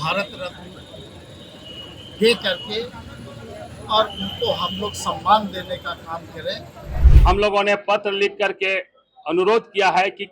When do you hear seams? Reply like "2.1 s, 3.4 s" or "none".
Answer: 7.0 s